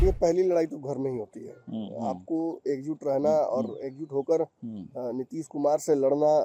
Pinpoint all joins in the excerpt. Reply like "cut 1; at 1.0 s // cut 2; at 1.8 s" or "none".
none